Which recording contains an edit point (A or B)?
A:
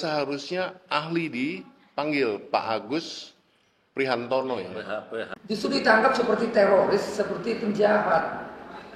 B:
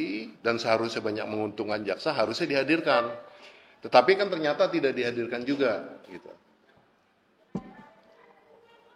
A